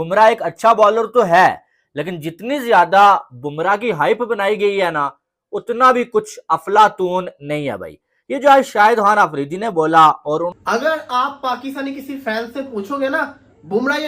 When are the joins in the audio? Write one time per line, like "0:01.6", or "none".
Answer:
0:10.6